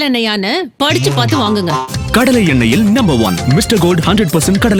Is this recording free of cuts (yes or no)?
yes